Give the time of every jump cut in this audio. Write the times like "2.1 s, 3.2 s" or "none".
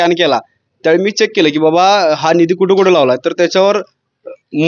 none

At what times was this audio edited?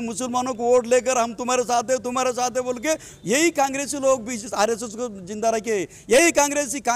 none

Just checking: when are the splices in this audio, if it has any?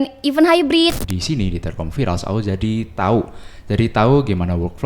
0.9 s

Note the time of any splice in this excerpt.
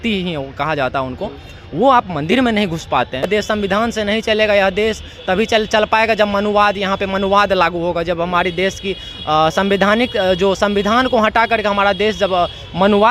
3.3 s

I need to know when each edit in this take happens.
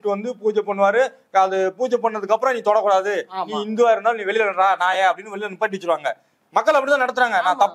none

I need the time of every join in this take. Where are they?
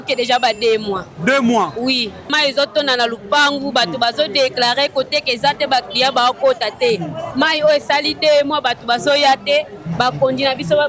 2.3 s

